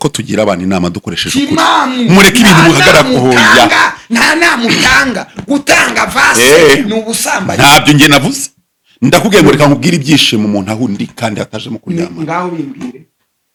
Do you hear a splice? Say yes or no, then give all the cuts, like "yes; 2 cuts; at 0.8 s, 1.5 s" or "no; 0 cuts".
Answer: no; 0 cuts